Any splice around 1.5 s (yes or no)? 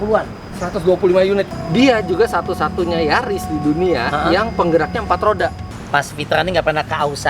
yes